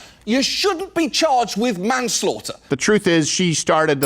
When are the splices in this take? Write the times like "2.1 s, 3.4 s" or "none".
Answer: 2.7 s